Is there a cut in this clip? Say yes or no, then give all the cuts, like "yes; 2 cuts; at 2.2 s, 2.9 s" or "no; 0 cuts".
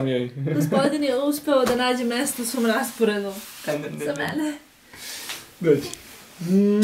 no; 0 cuts